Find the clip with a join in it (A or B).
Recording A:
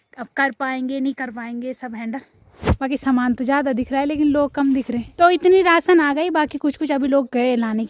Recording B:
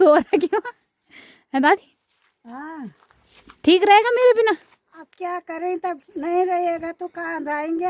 A